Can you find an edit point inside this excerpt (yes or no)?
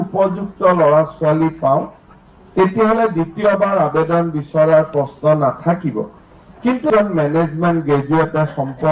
yes